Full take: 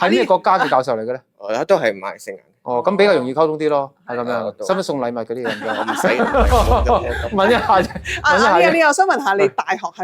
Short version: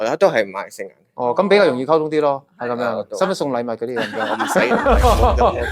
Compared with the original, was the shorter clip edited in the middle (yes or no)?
no